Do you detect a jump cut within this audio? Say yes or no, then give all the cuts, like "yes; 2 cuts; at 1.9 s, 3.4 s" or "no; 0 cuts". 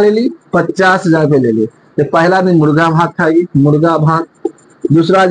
no; 0 cuts